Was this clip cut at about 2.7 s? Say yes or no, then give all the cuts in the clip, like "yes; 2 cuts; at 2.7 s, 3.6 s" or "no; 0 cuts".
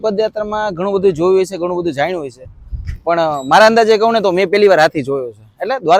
no; 0 cuts